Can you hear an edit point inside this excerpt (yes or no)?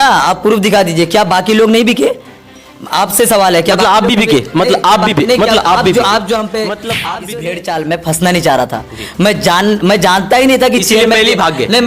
yes